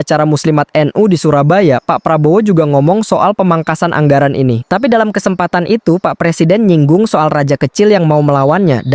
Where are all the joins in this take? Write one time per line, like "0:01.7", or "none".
none